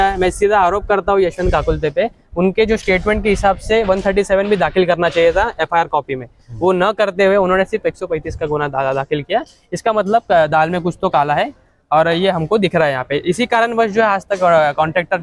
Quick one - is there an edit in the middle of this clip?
no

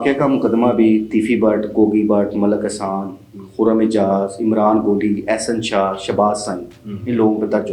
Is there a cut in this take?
no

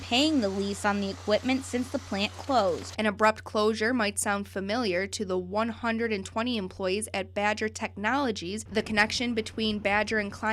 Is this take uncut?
no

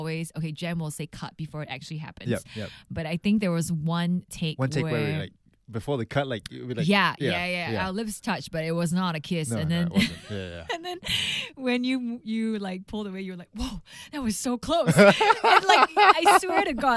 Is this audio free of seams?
yes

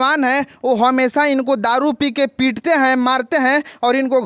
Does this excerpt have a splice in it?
no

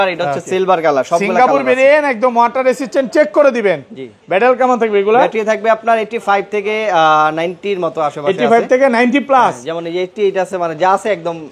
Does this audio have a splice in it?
no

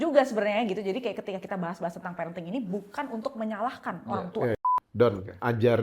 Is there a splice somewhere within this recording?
yes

